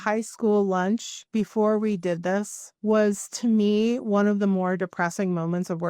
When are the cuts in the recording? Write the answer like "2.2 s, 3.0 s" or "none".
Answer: 1.2 s, 2.6 s